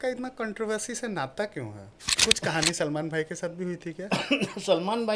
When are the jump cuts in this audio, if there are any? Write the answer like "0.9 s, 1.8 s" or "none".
2.1 s